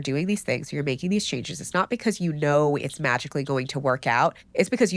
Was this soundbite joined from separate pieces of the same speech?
no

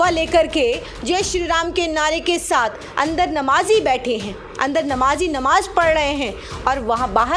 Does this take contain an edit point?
no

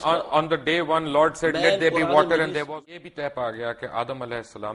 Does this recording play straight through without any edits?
no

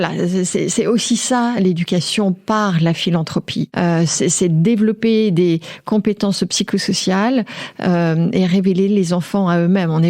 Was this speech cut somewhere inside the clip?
no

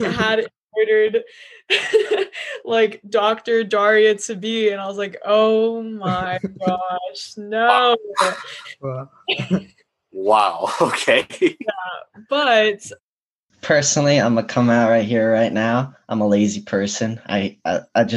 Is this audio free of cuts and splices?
no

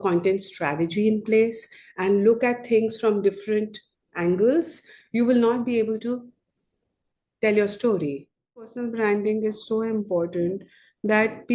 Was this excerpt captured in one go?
no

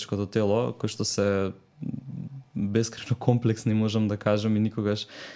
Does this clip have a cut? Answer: no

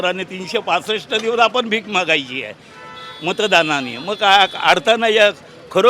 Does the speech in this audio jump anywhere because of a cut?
no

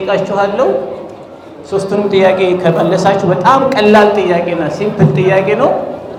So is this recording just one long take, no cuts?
yes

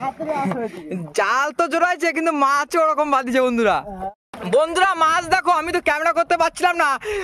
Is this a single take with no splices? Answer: no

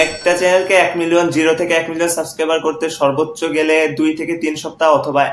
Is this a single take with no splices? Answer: yes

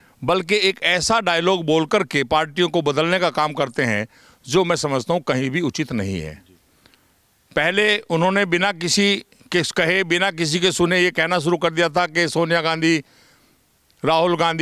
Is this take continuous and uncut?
yes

